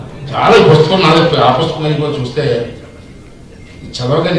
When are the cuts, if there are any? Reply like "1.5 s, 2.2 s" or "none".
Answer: none